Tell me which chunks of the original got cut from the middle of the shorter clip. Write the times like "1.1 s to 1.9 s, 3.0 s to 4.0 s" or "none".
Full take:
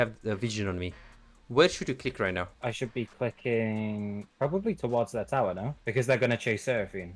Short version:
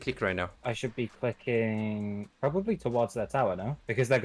none